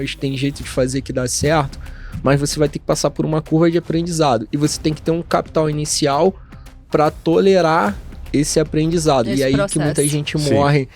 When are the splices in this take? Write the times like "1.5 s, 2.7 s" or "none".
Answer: none